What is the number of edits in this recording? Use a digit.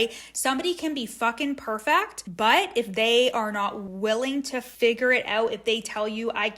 2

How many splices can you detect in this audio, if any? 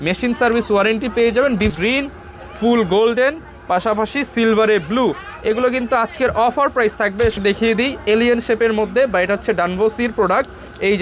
2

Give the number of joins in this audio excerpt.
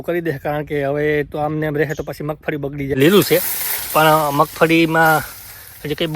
1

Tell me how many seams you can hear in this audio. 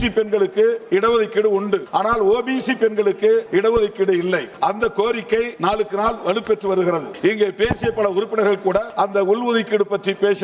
7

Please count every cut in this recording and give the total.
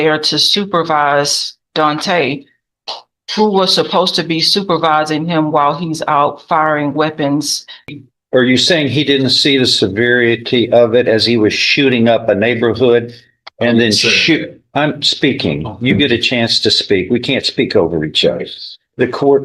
1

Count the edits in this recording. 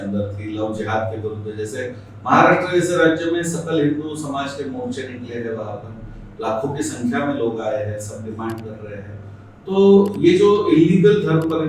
0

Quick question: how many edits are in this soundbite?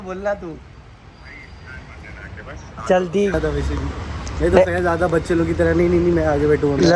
0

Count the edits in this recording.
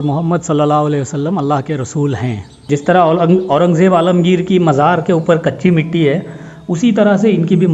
1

